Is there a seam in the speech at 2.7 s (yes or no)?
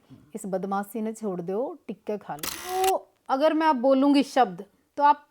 yes